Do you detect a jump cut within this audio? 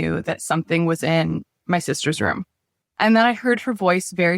yes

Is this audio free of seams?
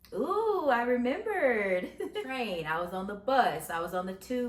no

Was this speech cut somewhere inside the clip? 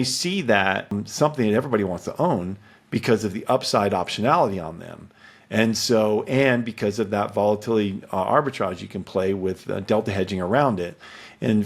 yes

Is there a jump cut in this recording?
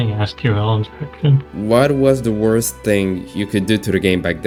no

